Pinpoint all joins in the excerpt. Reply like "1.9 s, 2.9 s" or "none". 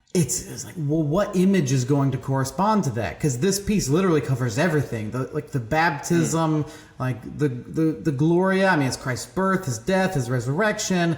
none